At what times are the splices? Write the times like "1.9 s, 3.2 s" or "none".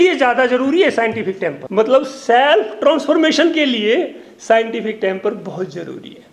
1.5 s